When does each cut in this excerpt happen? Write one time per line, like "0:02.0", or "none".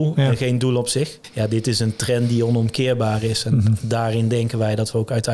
0:01.2